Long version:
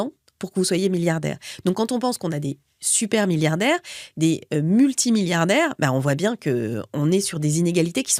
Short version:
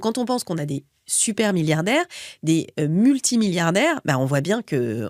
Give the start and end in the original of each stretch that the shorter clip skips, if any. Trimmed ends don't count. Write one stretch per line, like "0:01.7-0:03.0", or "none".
none

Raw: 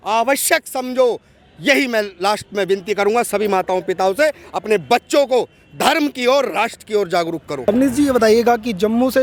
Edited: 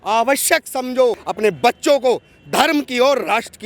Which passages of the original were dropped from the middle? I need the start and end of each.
0:01.3-0:04.5

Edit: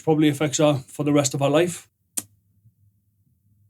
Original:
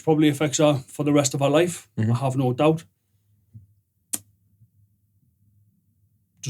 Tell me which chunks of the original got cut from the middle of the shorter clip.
0:01.8-0:03.8

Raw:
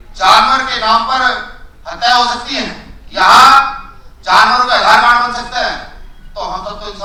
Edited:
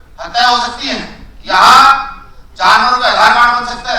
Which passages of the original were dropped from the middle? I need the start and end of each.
none

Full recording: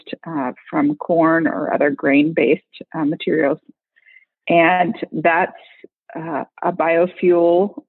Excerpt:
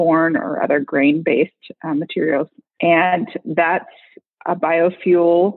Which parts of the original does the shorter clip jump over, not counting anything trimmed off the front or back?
0:03.7-0:04.3
0:06.0-0:06.5

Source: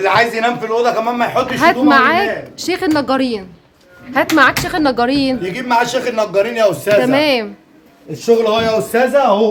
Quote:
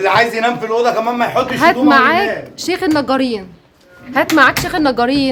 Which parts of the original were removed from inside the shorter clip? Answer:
none

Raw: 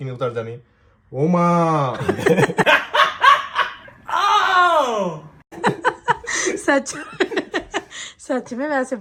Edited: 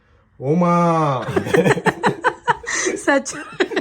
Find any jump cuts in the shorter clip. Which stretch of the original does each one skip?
0:02.6-0:05.5

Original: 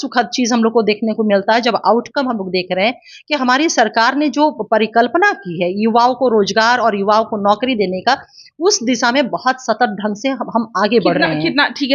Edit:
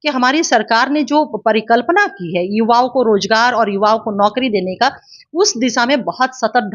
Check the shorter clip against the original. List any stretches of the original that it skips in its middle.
none

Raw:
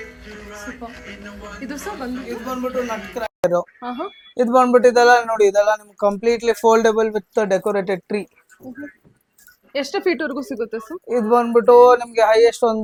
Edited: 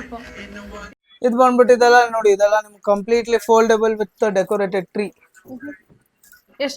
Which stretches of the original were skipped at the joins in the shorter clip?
0:01.7-0:04.2

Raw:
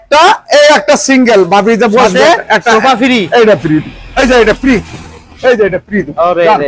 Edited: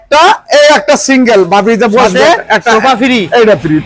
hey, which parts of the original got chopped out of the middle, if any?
none

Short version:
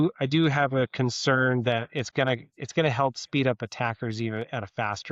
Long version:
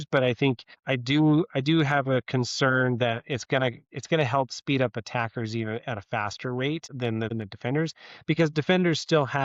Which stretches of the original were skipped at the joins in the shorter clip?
none

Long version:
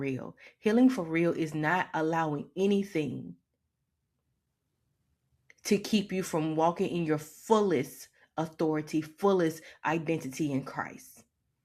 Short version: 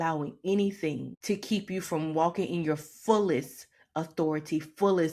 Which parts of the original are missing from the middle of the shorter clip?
0:03.2-0:05.5

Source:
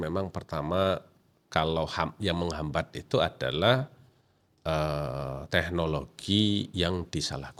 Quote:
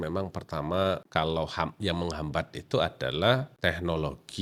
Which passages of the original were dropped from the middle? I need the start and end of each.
0:01.0-0:01.4
0:03.9-0:05.4

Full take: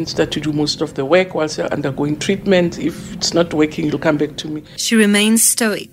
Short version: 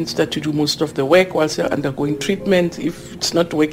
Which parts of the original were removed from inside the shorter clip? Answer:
none

